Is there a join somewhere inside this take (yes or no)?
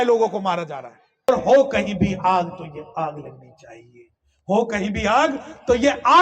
yes